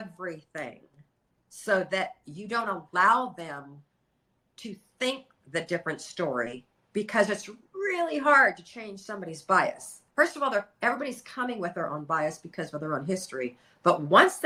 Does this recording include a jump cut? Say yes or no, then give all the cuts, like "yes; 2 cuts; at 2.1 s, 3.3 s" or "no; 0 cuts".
no; 0 cuts